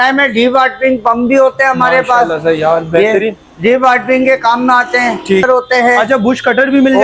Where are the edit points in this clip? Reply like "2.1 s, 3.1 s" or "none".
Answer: 5.4 s